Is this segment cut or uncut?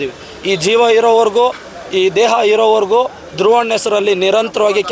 uncut